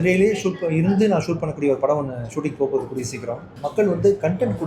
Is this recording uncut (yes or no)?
no